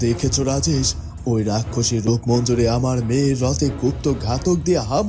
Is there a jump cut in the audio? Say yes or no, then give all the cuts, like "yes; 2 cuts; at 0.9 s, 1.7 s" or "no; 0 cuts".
no; 0 cuts